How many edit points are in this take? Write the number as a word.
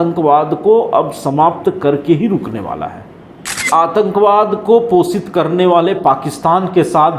one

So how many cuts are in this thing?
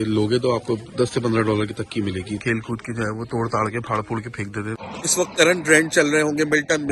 two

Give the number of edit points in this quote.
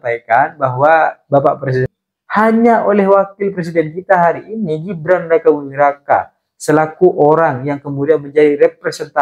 one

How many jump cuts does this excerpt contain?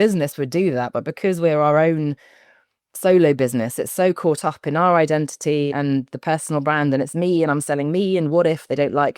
one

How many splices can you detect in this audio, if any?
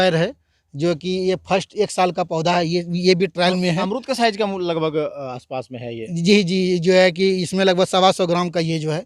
zero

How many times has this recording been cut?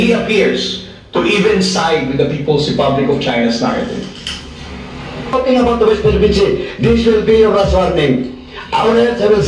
one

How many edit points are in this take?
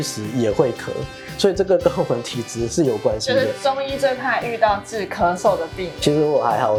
zero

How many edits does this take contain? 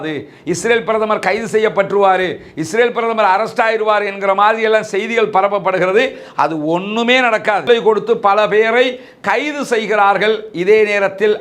one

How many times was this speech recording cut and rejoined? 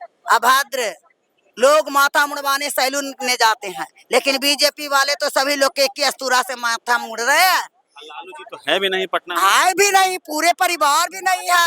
zero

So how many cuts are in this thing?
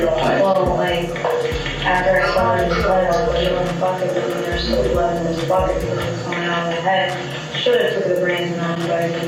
zero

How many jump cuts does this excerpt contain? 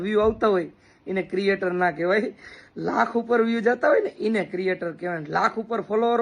one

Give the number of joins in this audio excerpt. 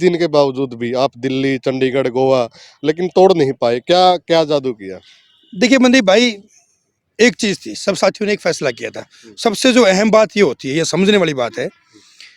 zero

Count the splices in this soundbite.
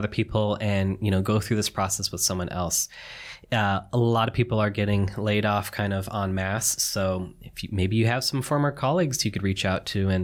zero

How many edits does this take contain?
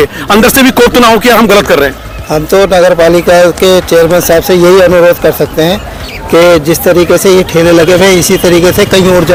zero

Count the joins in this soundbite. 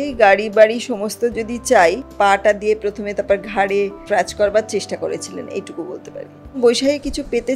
three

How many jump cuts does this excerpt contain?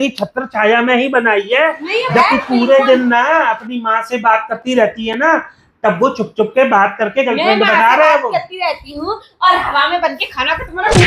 one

